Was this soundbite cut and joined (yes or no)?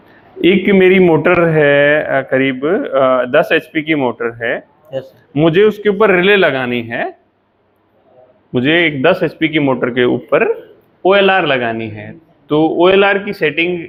no